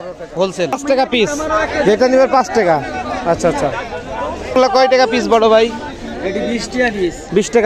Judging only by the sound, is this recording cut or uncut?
cut